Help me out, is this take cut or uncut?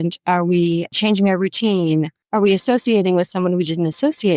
cut